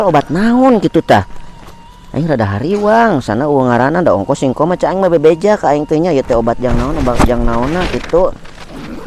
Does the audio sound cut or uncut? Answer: uncut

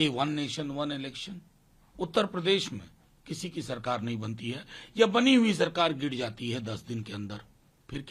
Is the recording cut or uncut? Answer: uncut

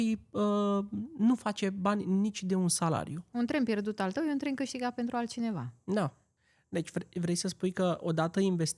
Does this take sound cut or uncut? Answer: cut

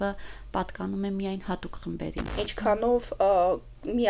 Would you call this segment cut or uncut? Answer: cut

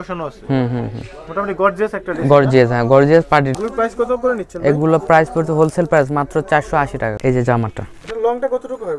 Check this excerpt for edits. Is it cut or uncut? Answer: cut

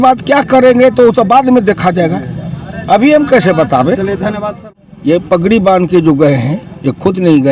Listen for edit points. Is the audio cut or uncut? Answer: cut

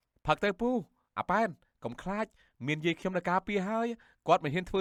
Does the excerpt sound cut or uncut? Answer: uncut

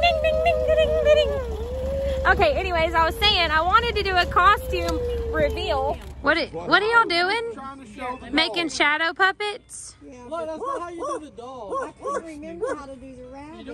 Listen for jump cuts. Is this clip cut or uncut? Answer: cut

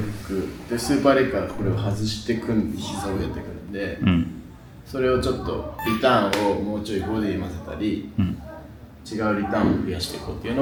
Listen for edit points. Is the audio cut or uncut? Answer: uncut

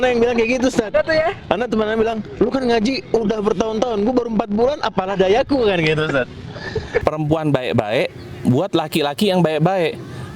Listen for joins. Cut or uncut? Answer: cut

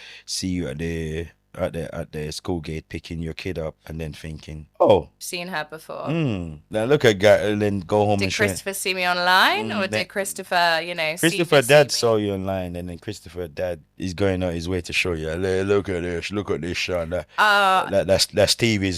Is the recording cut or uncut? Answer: cut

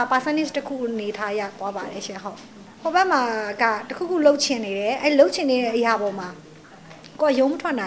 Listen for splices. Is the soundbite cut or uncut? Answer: cut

